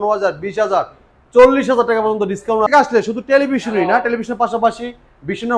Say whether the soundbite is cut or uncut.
cut